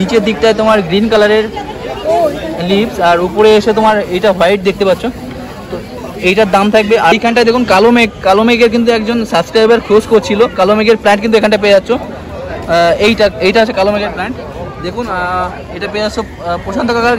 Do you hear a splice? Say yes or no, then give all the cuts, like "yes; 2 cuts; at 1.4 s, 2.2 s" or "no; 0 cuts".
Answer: yes; 1 cut; at 7.1 s